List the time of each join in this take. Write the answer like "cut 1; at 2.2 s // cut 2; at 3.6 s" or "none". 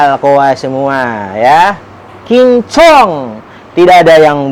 none